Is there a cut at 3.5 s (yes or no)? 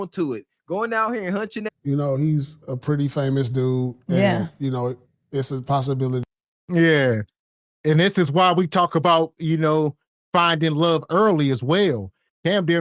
no